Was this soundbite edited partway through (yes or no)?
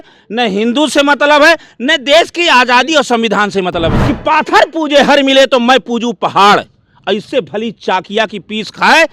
yes